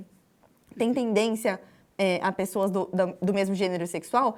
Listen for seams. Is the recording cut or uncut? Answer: uncut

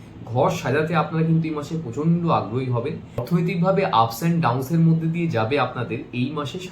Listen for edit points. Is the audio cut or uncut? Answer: cut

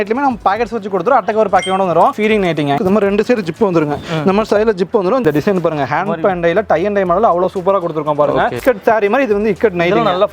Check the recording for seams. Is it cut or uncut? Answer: cut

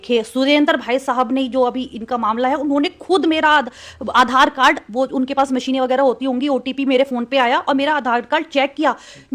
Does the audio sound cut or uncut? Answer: uncut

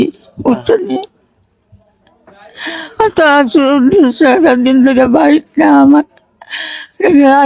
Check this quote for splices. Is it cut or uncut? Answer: uncut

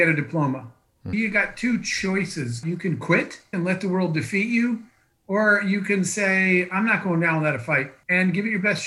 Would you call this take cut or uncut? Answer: cut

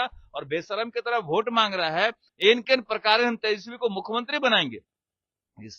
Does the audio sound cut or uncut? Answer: cut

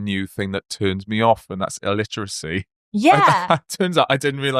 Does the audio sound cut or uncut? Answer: uncut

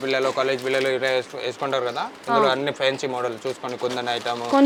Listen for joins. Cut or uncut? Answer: uncut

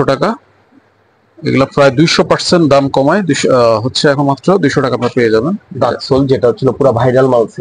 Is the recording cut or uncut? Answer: uncut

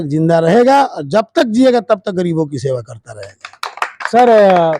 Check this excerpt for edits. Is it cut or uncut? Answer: uncut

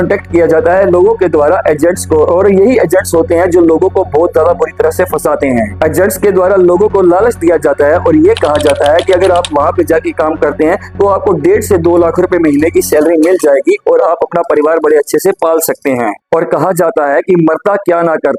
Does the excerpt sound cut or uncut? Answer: uncut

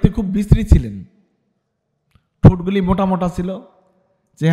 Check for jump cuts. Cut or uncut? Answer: uncut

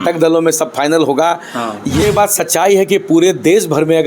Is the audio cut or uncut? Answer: cut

